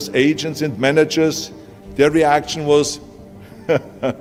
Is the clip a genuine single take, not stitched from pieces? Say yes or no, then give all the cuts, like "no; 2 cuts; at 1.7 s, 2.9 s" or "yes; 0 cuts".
yes; 0 cuts